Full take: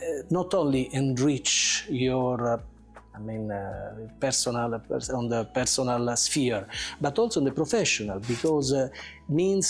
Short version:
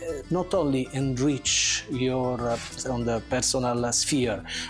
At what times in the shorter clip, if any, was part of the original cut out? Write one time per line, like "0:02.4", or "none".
0:02.8